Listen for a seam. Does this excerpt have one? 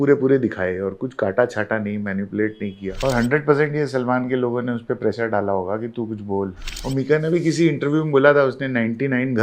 yes; 2 cuts; at 2.9 s, 6.7 s

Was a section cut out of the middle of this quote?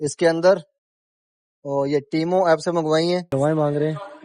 yes; 1 cut; at 3.3 s

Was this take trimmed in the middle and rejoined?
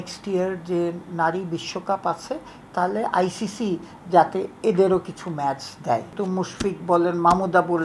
yes; 1 cut; at 6.1 s

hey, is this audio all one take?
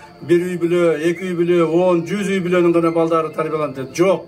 yes; 0 cuts

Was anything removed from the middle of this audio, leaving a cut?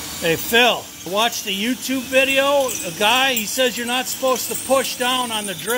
yes; 1 cut; at 0.9 s

